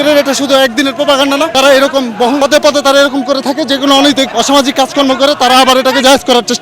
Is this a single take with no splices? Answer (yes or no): no